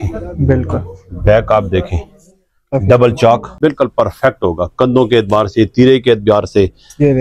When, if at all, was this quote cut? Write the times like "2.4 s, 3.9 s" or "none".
3.5 s